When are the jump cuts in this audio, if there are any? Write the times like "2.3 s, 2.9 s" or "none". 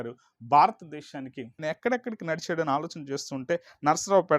1.6 s